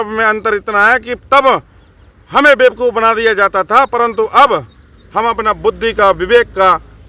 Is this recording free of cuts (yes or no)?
yes